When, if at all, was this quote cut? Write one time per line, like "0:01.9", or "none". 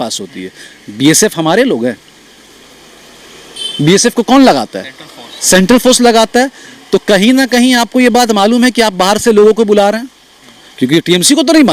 none